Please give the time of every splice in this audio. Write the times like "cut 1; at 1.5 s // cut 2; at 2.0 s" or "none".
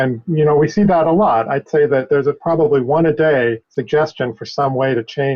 cut 1; at 3.7 s